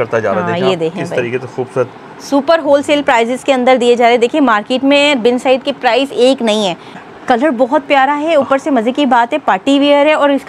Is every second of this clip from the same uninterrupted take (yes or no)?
no